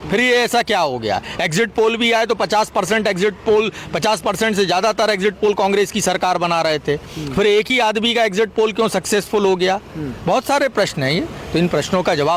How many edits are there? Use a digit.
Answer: 0